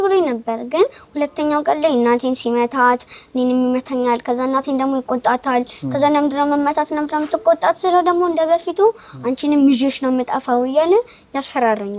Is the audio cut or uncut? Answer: uncut